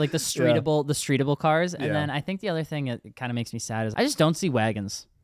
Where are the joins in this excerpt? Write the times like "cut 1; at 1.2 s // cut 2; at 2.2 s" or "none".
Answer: cut 1; at 3.9 s